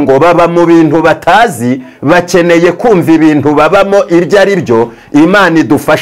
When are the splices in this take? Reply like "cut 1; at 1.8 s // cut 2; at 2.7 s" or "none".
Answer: none